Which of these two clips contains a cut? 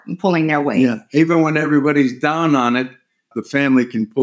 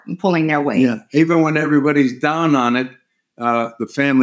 first; 1 cut; at 3.3 s

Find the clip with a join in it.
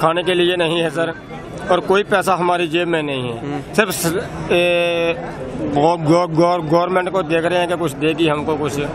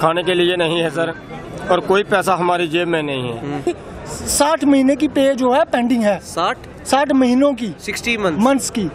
second; 1 cut; at 3.7 s

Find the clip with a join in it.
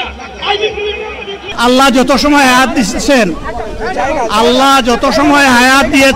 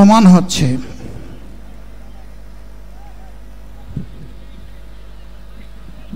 first; 1 cut; at 1.5 s

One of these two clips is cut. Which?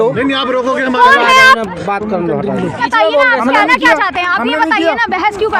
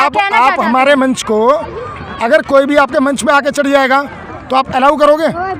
first; 1 cut; at 2.8 s

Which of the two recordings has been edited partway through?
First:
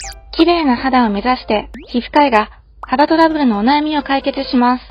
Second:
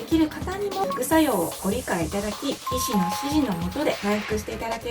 second; 3 cuts; at 0.8 s, 2.7 s, 4.0 s

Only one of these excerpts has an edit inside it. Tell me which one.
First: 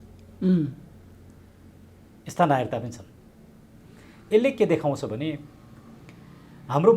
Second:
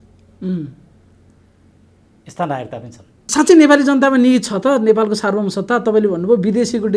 second; 1 cut; at 3.3 s

